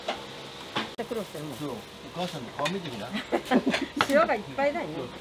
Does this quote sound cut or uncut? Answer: cut